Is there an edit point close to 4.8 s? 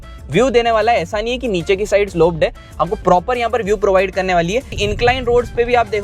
yes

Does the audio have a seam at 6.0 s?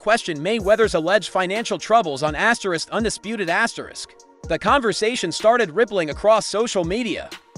no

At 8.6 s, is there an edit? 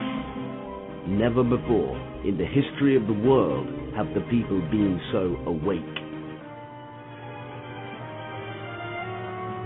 no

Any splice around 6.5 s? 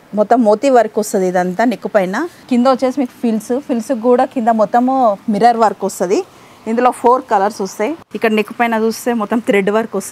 no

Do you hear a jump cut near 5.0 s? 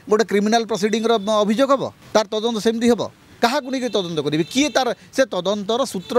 no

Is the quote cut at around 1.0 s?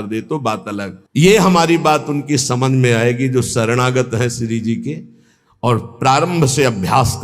no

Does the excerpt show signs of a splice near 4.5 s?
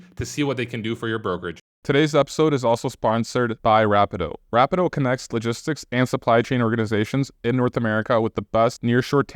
no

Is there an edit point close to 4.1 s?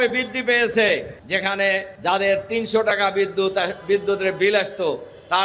no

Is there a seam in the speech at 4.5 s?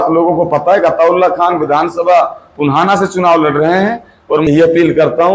yes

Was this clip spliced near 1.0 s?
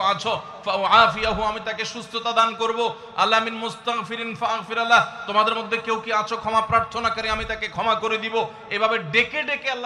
no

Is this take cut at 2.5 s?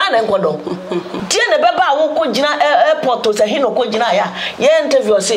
no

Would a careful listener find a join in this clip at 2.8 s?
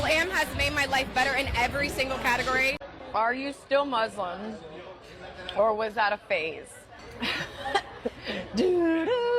yes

